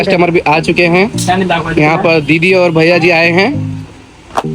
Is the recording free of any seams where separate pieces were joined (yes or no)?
yes